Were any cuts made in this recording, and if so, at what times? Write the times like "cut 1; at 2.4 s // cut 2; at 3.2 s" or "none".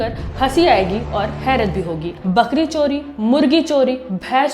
cut 1; at 2.1 s

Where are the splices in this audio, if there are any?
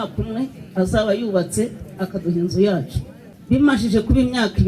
cut 1; at 3.5 s

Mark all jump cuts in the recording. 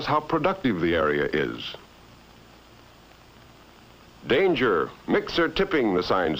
cut 1; at 1.3 s

